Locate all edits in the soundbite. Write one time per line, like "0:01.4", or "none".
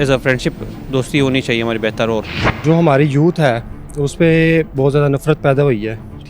0:02.6